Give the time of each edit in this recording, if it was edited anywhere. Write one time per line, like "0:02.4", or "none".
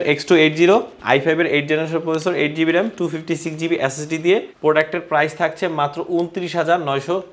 0:04.5

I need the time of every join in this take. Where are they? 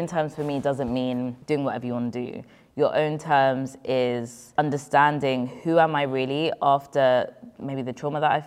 0:01.4
0:04.6

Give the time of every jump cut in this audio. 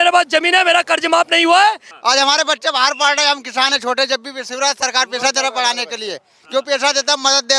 0:01.9

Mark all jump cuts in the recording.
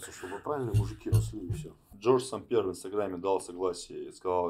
0:01.7

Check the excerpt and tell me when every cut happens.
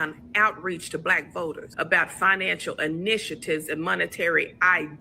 0:01.7

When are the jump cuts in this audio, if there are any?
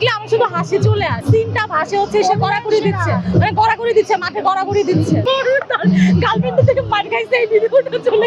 0:01.2
0:05.2

